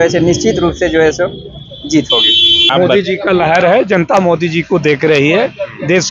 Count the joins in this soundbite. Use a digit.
1